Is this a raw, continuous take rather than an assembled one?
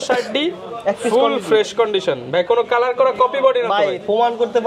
yes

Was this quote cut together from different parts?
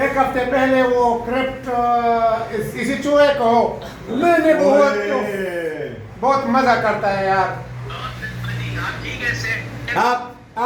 no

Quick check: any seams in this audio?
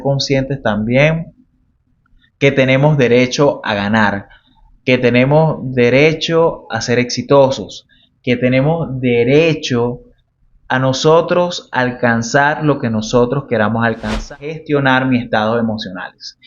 yes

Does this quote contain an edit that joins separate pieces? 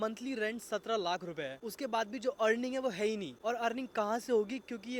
no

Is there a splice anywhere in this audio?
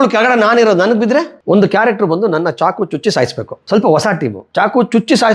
yes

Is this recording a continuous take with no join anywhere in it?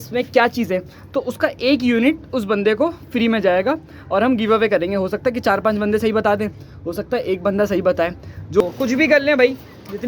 no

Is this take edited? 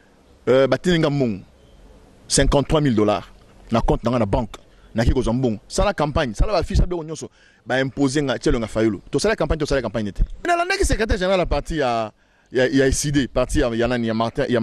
yes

